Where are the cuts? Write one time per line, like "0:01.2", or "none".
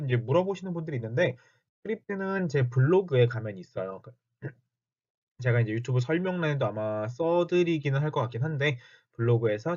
0:03.6